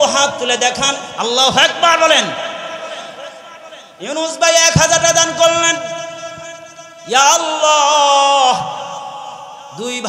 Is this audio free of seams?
no; 1 cut; at 1.1 s

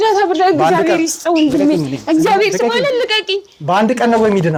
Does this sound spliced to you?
no; 0 cuts

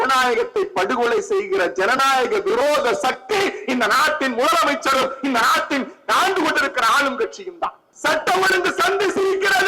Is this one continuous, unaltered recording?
no; 1 cut; at 7.9 s

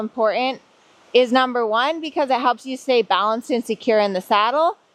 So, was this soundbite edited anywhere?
no; 0 cuts

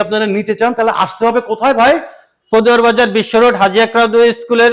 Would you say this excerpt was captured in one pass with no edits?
yes; 0 cuts

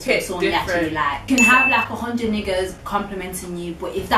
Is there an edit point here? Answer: yes; 1 cut; at 1.3 s

